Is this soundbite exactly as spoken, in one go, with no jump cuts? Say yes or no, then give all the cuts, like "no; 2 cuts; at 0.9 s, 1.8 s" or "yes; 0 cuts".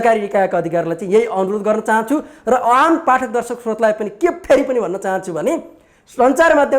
yes; 0 cuts